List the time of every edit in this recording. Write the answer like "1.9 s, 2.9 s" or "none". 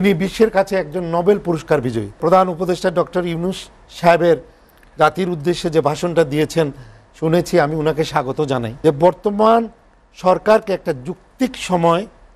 2.2 s, 8.7 s

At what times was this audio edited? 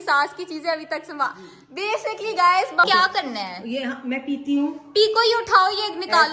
2.8 s

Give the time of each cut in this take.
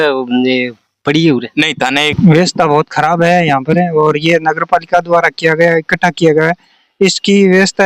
2.1 s

